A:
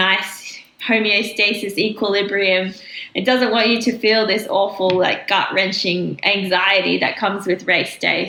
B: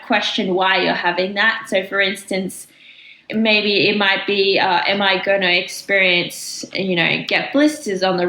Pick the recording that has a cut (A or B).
B